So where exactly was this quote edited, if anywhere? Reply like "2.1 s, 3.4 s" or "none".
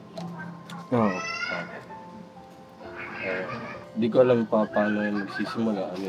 3.9 s